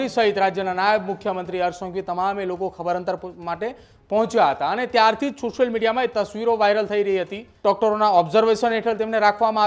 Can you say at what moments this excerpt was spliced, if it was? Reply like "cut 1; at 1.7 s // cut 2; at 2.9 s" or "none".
cut 1; at 7.4 s